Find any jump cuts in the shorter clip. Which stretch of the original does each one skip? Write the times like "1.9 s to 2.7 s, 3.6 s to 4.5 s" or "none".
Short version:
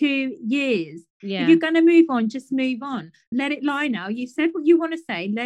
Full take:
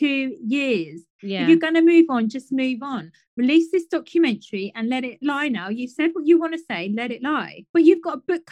3.4 s to 5.0 s